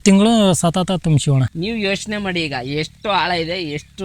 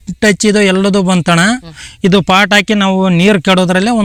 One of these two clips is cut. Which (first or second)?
first